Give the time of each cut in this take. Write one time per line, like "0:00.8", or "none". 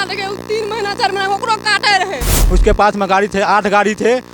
0:02.3